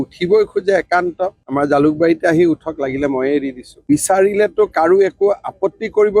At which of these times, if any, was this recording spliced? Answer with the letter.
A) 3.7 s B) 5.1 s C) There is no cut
A